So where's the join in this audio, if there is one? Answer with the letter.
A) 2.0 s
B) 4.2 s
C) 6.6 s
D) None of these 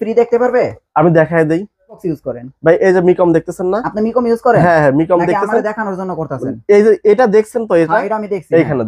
A